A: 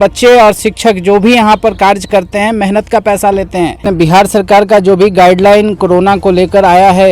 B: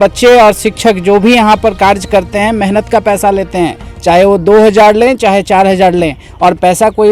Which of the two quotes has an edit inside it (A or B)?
A